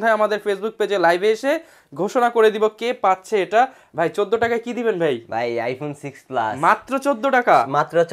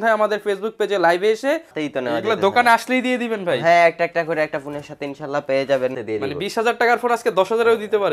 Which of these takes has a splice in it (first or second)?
second